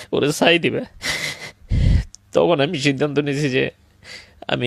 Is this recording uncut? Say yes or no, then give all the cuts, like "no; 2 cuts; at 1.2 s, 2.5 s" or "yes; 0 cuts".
yes; 0 cuts